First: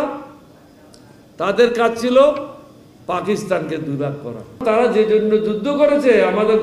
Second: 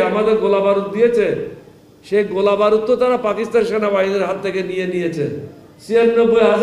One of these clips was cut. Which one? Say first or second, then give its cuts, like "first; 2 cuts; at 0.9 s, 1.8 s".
first; 1 cut; at 4.6 s